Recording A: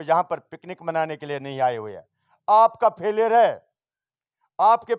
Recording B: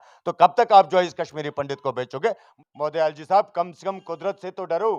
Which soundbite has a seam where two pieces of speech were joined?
B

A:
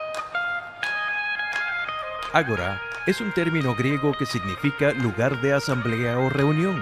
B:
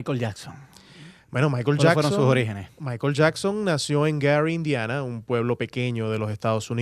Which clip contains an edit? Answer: B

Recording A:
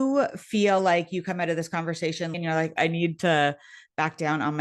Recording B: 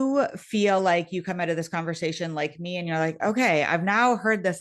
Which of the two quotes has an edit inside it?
A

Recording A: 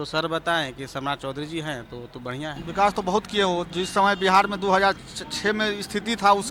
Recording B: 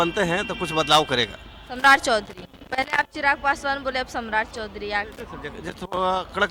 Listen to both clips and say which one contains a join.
A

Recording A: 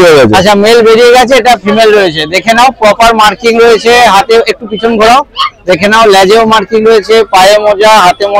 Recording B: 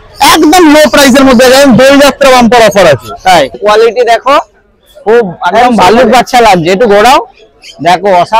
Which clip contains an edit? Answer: B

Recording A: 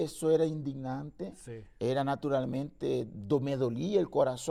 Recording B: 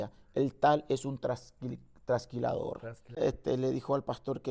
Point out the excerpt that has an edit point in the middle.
B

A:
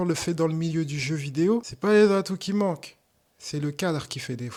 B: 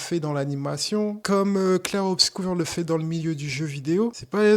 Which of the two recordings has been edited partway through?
B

